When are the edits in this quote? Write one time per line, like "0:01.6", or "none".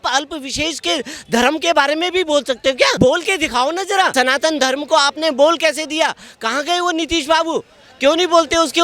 0:02.9
0:04.1